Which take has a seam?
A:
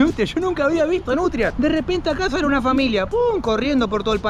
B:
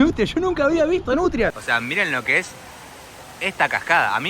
B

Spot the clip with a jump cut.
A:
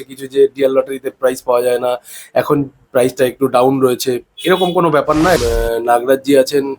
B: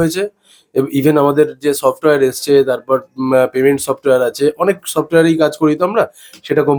A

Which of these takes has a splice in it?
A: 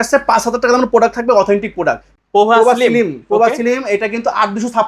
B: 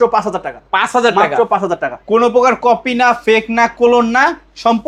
A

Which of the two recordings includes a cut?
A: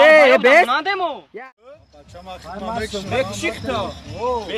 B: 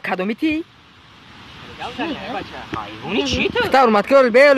A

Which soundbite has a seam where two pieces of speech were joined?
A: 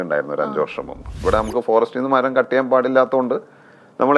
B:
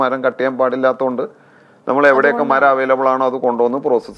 A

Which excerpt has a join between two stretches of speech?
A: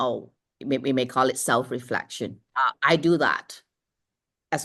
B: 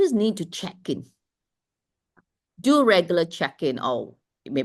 A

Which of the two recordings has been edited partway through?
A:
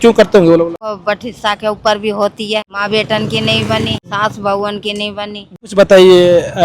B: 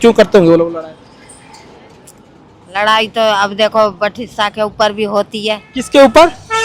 A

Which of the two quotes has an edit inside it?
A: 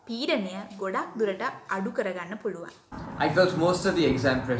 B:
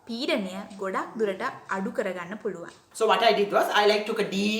B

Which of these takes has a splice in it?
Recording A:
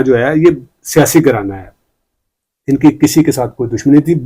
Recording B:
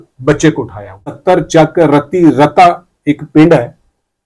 B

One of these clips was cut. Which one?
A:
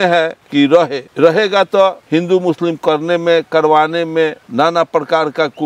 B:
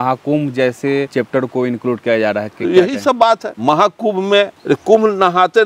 B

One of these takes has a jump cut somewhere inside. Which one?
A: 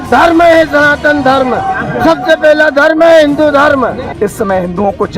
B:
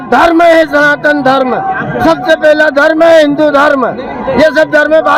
A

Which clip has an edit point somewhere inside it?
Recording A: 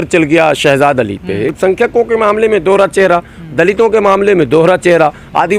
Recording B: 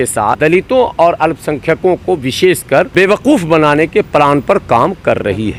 A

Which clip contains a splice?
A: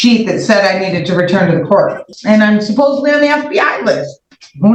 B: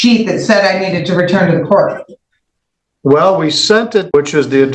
A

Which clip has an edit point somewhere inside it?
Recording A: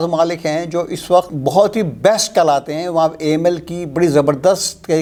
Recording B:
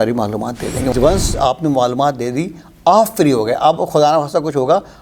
B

